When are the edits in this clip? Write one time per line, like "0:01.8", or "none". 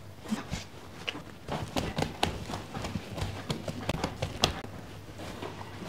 0:04.6